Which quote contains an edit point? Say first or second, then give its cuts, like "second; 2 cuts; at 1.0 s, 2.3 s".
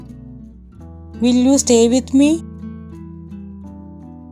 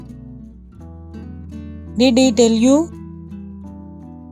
first; 2 cuts; at 1.2 s, 2.9 s